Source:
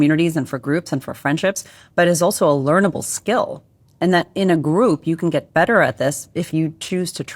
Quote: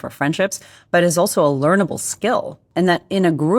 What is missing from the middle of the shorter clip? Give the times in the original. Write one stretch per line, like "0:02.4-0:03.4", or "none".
0:03.6-0:03.8

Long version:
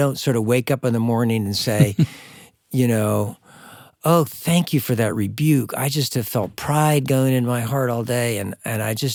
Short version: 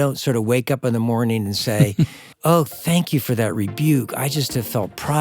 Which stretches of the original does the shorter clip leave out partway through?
0:02.2-0:03.9

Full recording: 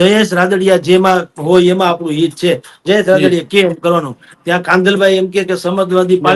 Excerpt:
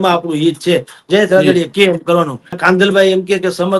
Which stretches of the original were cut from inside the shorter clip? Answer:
0:04.3-0:04.6

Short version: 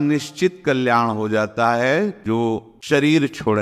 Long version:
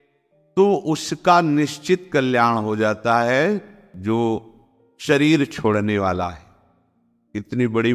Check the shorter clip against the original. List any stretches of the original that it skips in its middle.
0:03.9-0:04.6

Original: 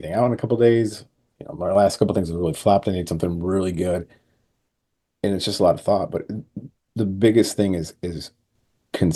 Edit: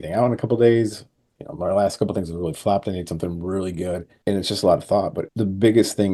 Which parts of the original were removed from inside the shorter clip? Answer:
0:04.1-0:05.1
0:06.2-0:06.8

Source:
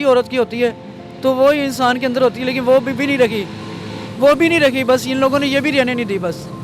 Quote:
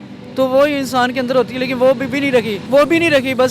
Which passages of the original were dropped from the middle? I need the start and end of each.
0:03.4-0:04.1

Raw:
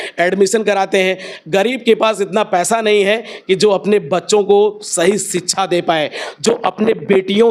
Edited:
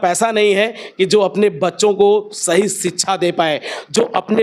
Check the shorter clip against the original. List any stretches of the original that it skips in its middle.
none

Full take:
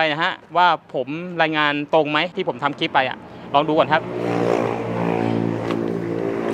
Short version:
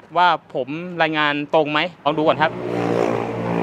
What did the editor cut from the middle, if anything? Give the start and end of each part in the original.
0:02.4-0:03.5

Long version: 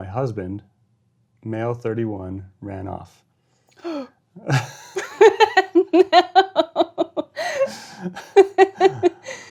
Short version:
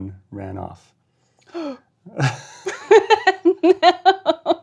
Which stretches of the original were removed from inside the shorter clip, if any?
none

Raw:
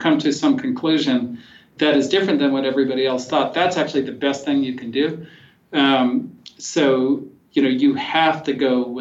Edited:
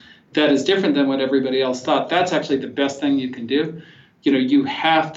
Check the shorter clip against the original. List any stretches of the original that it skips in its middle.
0:05.5-0:07.3

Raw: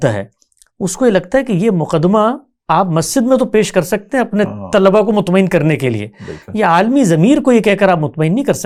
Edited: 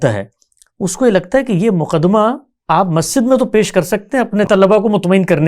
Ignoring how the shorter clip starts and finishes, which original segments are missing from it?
0:04.5-0:04.7

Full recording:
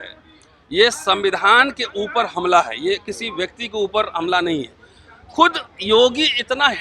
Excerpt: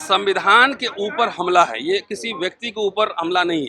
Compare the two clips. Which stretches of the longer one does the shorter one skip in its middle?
none

